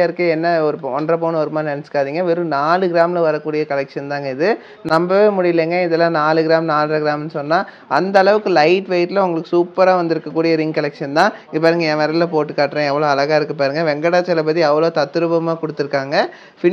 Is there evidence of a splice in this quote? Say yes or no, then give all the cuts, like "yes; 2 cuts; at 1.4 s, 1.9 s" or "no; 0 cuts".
no; 0 cuts